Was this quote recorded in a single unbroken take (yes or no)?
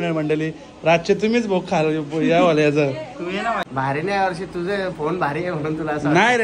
no